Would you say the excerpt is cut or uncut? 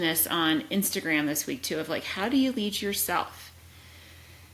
uncut